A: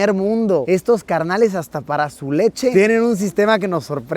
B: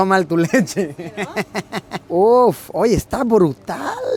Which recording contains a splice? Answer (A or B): A